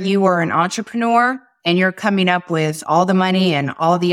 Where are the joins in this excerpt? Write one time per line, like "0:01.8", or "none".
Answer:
none